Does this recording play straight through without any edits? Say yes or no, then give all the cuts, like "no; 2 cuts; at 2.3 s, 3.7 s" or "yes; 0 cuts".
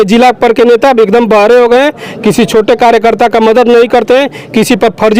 yes; 0 cuts